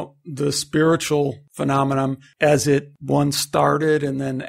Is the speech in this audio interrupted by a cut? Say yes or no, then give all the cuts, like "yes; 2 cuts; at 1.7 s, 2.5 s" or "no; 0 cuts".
yes; 2 cuts; at 1.9 s, 2.9 s